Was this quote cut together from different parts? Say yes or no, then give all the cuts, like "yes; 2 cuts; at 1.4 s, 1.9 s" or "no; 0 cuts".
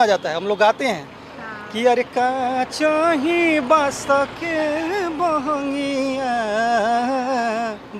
no; 0 cuts